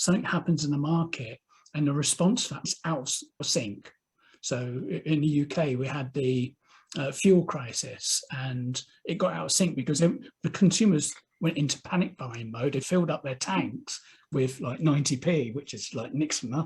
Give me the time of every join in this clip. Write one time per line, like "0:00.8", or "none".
0:02.8
0:12.8